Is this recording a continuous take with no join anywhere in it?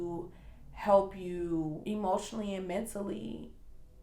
no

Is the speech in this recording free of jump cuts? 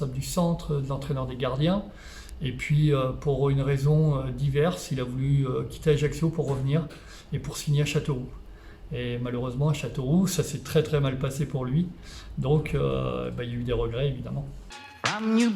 no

